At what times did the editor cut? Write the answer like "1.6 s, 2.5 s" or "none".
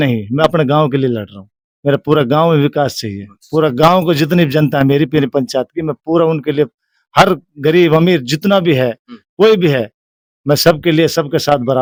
none